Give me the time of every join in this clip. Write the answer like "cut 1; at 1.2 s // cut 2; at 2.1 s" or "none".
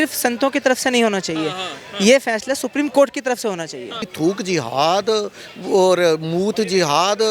cut 1; at 4.1 s